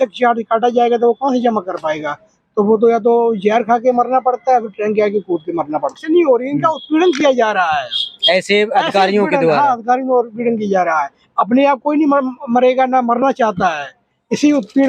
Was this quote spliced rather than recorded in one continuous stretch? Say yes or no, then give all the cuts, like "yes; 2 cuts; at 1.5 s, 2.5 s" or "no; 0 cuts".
yes; 1 cut; at 6.0 s